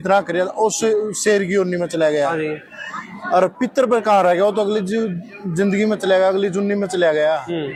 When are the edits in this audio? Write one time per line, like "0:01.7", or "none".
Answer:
none